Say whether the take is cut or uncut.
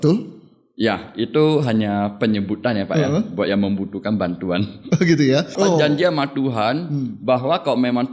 cut